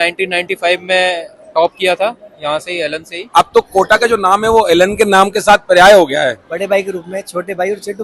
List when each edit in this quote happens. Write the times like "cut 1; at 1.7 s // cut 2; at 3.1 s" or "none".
cut 1; at 3.2 s // cut 2; at 6.5 s